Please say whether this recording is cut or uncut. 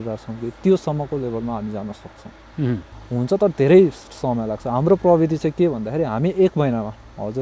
cut